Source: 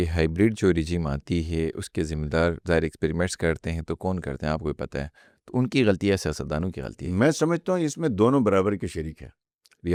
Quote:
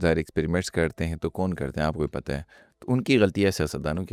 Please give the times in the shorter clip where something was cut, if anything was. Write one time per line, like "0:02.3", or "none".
none